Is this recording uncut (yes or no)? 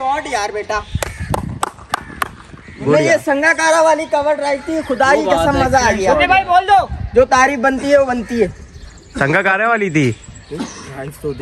yes